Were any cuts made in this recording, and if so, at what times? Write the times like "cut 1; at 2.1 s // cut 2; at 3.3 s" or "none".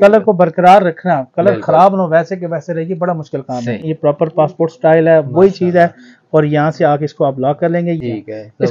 cut 1; at 3.9 s // cut 2; at 8.0 s